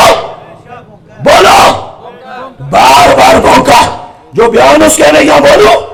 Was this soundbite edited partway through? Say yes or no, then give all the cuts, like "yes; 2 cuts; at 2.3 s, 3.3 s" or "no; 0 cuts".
no; 0 cuts